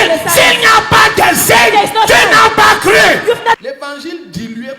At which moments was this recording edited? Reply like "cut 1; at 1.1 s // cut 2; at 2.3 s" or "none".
cut 1; at 3.6 s